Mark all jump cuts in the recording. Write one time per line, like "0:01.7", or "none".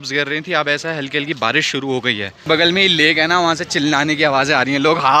0:02.3